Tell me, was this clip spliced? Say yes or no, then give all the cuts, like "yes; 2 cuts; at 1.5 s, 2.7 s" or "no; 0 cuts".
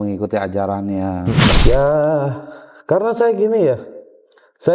yes; 1 cut; at 1.5 s